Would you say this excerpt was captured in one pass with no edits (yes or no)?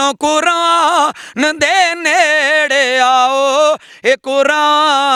yes